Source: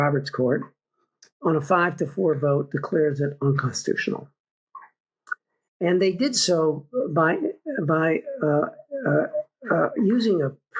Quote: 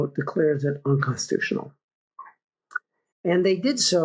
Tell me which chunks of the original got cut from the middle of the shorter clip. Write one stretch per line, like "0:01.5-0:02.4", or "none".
none